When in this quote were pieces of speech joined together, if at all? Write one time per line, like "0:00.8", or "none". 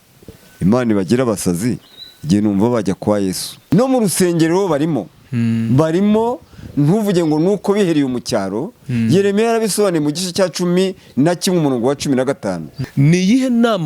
0:03.5
0:12.7